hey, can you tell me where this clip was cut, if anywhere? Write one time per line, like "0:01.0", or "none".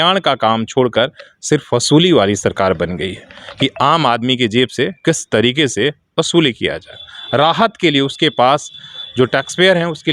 none